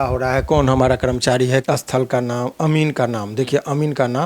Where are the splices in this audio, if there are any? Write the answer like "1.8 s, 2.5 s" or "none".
1.6 s